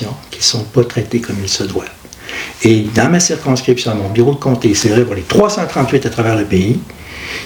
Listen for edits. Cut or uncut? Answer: uncut